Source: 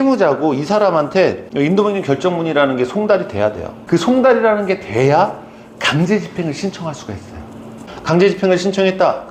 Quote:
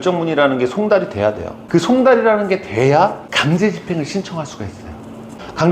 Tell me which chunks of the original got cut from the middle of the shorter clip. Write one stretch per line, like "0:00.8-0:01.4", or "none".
0:05.4-0:05.7

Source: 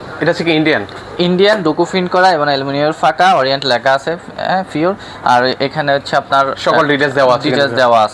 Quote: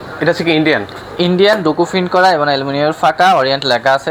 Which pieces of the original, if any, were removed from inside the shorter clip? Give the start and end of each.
none

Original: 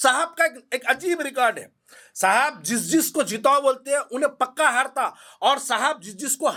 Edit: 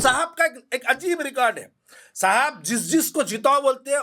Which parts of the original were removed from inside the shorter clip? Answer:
none

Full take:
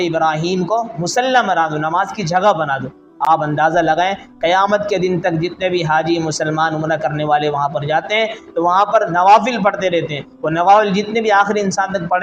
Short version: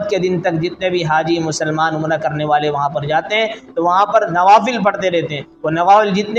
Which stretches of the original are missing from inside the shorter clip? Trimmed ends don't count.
none

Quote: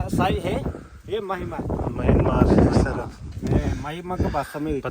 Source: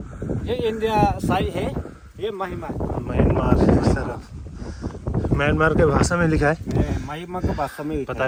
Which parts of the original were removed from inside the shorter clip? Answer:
0:04.5-0:06.6

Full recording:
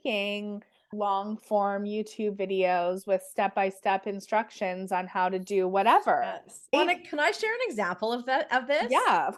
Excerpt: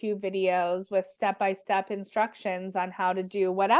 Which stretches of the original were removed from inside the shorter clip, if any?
none

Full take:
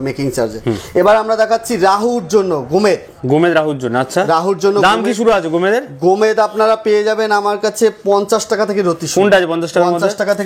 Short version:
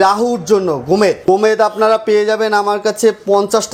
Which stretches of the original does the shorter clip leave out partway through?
0:03.0-0:06.0

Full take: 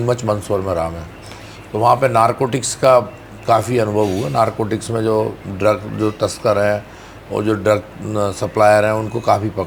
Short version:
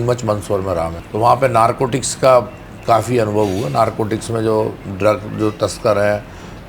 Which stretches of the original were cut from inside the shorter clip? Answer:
0:01.0-0:01.6

